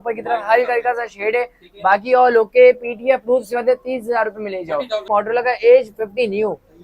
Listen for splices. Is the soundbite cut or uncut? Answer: cut